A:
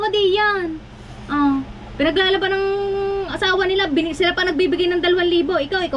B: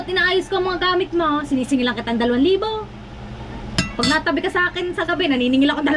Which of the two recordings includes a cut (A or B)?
B